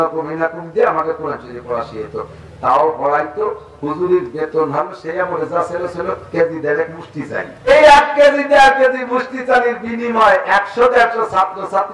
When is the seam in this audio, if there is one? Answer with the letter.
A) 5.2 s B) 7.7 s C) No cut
B